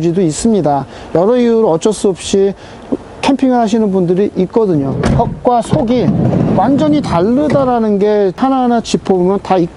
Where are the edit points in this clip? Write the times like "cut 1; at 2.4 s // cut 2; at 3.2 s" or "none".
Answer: cut 1; at 4.9 s // cut 2; at 8.4 s